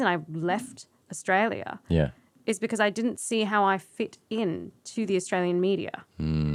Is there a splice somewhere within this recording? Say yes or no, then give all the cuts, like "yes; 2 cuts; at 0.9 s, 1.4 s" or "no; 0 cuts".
no; 0 cuts